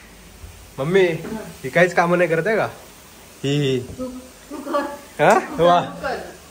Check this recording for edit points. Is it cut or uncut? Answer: uncut